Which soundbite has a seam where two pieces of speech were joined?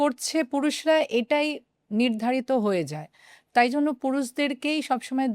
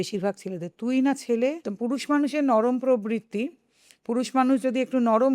second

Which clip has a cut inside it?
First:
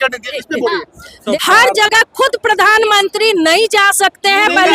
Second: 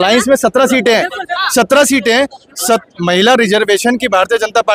first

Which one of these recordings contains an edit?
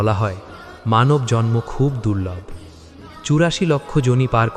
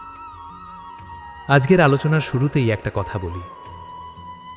second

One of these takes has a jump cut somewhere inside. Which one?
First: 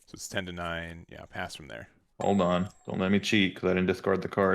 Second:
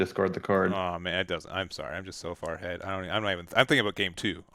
first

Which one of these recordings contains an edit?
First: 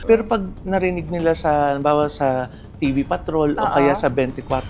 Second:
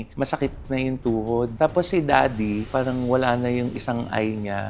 second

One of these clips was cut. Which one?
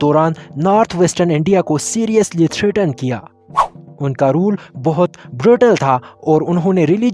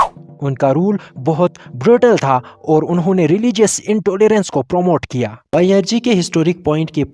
second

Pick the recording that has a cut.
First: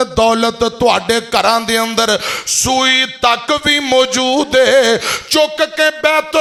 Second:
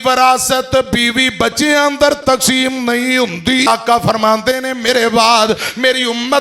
second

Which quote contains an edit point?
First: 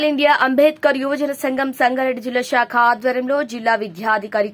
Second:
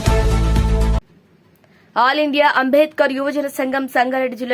second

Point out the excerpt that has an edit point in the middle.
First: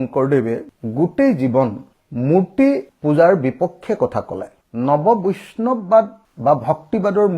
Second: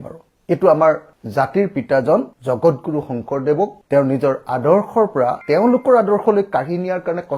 first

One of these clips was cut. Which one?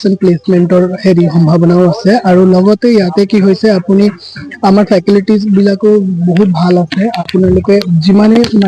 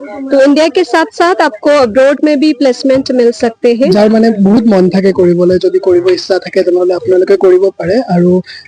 second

